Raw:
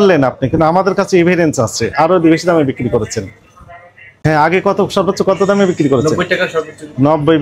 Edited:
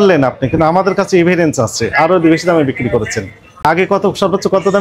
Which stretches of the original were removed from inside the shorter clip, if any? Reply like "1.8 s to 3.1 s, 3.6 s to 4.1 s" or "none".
3.6 s to 4.4 s